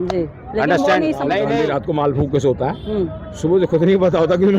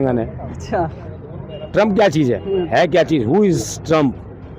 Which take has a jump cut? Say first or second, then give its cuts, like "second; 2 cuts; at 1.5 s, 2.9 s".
first; 1 cut; at 1.6 s